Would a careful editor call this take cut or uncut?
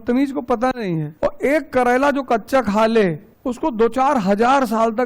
cut